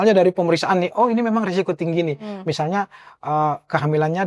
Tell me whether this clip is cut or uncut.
uncut